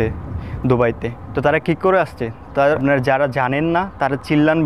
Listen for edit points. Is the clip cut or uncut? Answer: cut